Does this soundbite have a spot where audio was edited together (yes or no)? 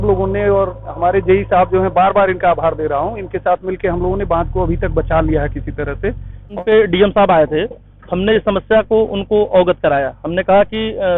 yes